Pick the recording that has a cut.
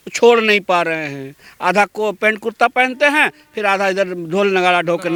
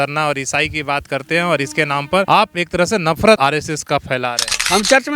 second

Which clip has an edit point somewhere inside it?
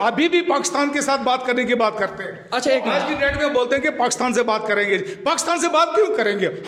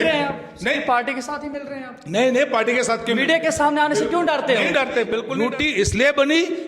second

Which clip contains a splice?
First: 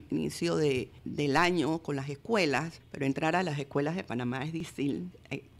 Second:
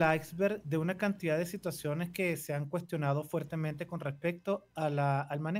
first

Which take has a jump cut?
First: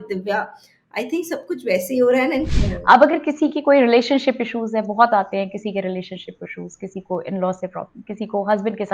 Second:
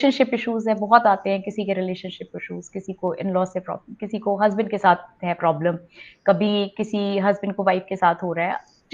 first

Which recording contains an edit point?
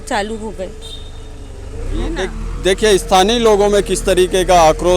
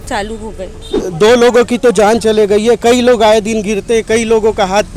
second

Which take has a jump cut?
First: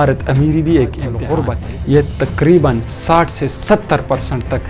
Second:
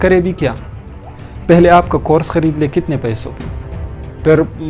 first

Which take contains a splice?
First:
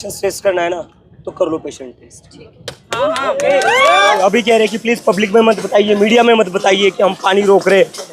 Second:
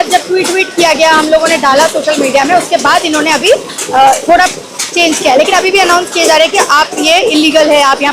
first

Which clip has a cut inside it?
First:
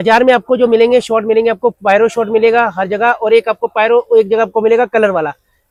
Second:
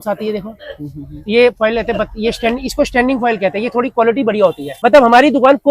second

